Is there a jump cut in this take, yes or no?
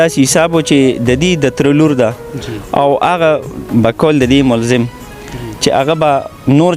no